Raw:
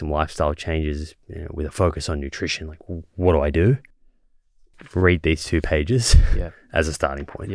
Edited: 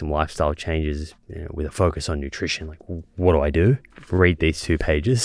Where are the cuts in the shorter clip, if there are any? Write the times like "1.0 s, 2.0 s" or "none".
3.9 s